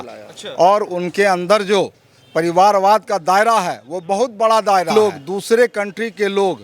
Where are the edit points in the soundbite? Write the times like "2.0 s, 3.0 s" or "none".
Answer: 4.9 s